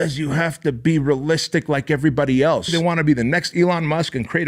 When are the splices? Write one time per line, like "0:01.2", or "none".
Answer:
0:02.7